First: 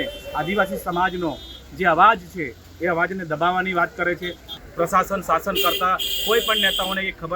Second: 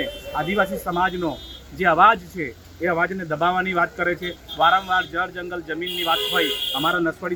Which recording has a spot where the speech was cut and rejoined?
first; 1 cut; at 4.5 s

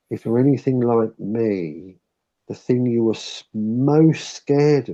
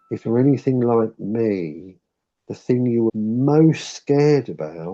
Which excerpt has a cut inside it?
second; 1 cut; at 3.1 s

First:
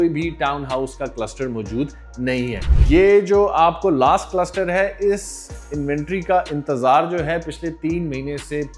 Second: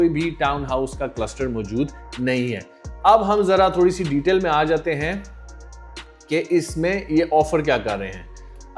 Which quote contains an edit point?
first; 1 cut; at 2.7 s

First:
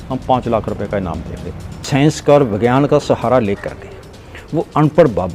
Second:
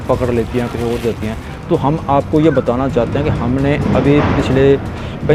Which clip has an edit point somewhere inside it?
first; 1 cut; at 1.8 s

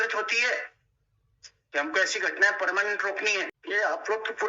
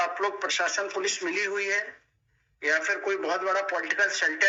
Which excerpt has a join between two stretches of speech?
first; 1 cut; at 3.6 s

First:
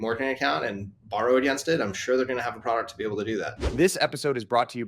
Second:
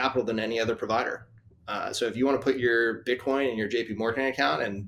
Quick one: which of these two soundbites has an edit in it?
first; 1 cut; at 3.6 s

